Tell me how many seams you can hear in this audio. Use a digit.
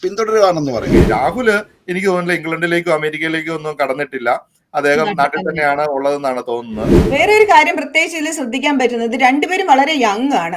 2